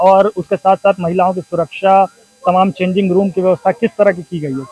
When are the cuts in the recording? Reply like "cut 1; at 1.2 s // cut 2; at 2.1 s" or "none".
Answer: none